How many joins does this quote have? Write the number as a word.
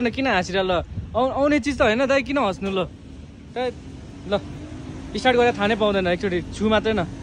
zero